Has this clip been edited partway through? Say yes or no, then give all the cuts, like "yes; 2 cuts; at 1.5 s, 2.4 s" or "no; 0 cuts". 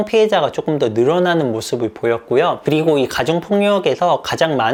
no; 0 cuts